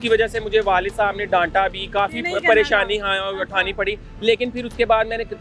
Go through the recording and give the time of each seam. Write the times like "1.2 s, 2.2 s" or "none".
none